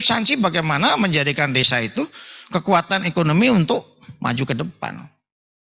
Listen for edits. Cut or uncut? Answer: uncut